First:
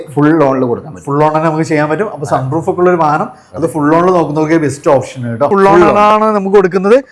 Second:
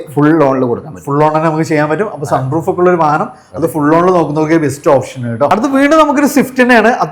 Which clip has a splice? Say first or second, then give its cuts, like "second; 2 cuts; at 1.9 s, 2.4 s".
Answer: first; 1 cut; at 5.5 s